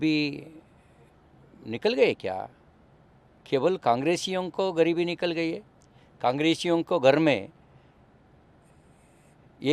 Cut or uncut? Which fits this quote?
uncut